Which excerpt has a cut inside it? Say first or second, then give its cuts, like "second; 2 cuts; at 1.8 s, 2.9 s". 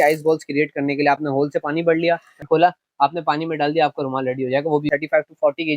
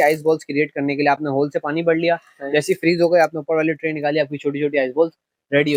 first; 2 cuts; at 2.4 s, 4.9 s